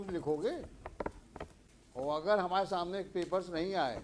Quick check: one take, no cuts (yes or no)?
yes